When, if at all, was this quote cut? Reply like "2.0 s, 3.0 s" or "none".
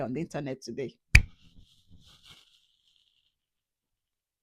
none